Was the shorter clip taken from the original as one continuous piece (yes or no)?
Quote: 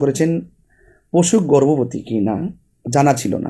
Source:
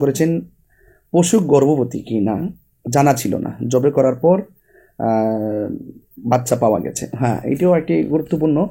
yes